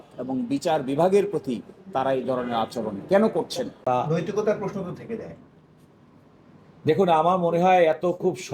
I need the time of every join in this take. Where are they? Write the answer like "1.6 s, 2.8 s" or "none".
3.9 s